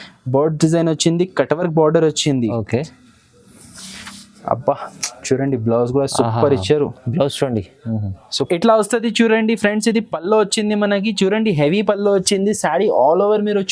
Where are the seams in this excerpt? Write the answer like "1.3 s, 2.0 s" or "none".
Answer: 8.5 s